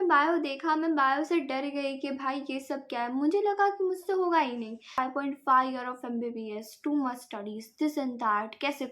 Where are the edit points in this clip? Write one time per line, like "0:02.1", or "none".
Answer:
0:05.0